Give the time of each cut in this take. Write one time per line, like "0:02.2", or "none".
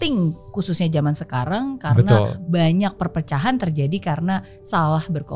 none